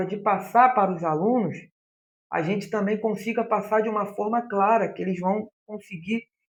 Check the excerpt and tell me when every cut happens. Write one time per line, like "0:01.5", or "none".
none

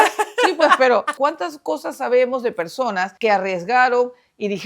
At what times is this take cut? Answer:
0:01.1
0:03.1

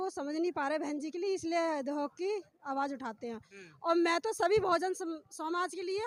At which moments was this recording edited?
none

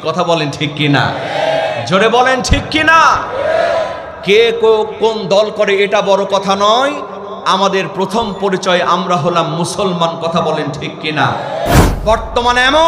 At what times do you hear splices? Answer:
0:11.8

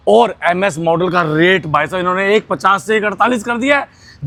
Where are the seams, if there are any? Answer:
none

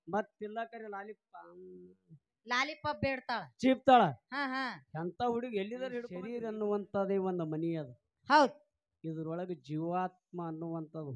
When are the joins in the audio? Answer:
0:06.4

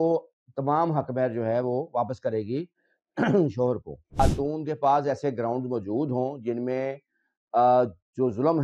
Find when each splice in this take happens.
0:04.2

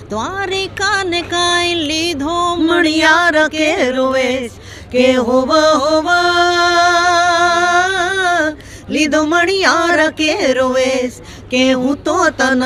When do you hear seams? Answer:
none

